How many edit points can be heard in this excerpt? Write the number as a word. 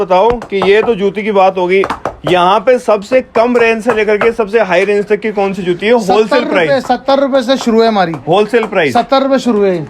zero